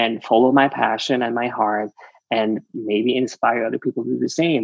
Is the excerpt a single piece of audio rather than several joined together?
yes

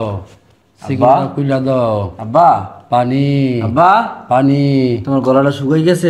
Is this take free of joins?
yes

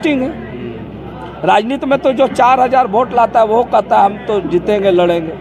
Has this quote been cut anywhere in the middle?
no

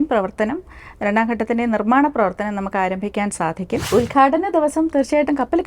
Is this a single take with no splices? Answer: no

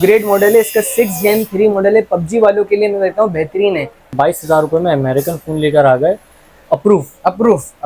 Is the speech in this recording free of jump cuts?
no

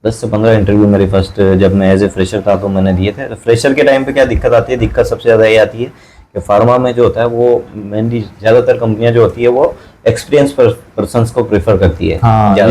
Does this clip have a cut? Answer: no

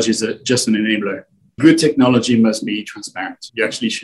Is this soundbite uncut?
yes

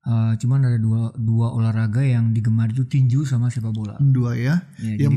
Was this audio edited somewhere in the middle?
no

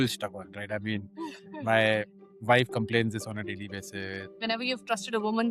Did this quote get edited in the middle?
yes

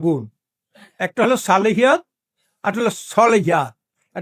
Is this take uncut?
yes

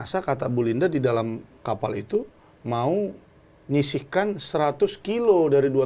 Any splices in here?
no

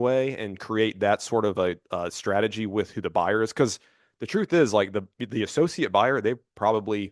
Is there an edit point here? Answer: no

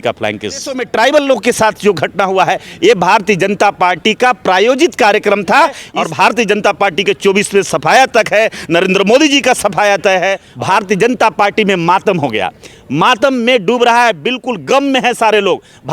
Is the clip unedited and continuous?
no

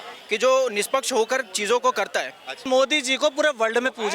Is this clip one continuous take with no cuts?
no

